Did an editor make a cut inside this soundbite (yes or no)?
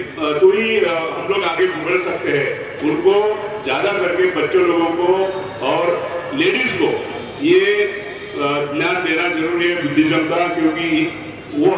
no